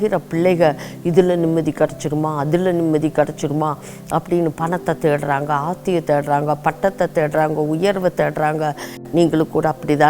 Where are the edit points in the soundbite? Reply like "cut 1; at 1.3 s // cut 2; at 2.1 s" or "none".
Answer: cut 1; at 8.9 s